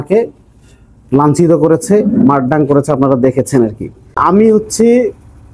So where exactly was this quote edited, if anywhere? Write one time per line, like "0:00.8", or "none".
0:04.2